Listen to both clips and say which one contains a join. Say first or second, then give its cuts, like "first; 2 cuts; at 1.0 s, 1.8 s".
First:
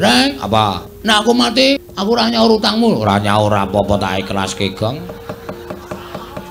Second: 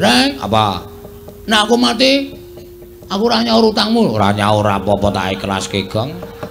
first; 2 cuts; at 0.9 s, 1.9 s